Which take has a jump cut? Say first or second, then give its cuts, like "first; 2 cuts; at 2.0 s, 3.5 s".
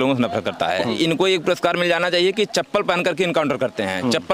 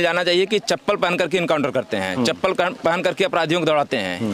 first; 1 cut; at 0.9 s